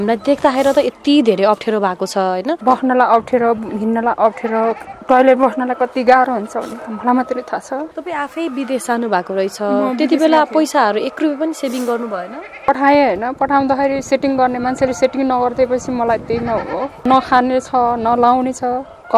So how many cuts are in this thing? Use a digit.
5